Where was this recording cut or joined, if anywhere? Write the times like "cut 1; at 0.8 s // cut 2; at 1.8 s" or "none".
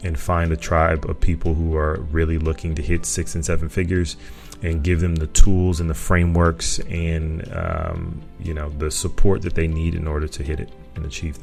none

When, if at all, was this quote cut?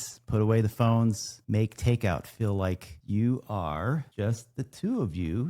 cut 1; at 1.3 s // cut 2; at 2.9 s // cut 3; at 4.1 s

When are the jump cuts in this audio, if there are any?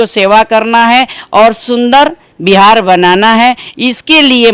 none

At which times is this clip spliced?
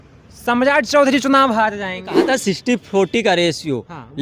cut 1; at 2.2 s

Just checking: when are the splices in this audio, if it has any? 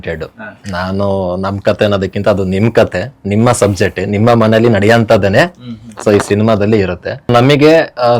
cut 1; at 7.3 s

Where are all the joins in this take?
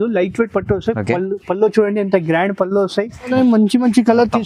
cut 1; at 3.3 s

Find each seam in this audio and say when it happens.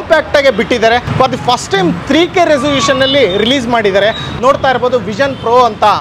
cut 1; at 1.1 s

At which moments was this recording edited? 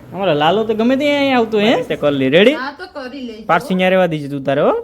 cut 1; at 1.9 s

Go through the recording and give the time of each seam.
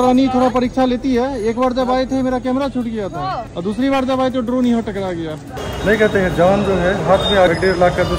cut 1; at 5.7 s // cut 2; at 7.5 s

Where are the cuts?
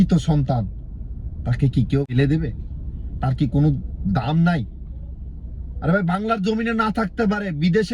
cut 1; at 2.1 s

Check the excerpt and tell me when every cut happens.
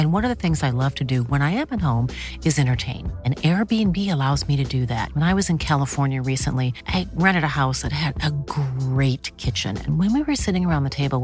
none

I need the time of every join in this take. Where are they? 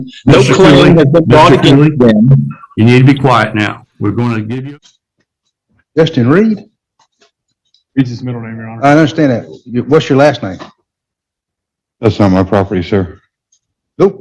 cut 1; at 4.6 s

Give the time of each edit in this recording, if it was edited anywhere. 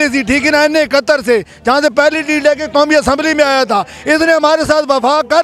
none

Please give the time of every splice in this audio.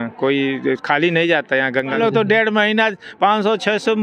cut 1; at 2.0 s

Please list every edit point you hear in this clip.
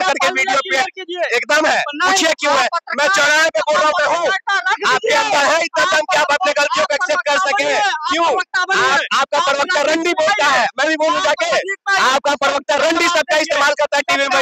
none

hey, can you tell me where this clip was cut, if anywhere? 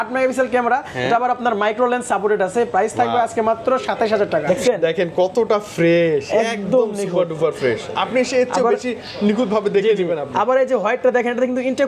cut 1; at 4.4 s

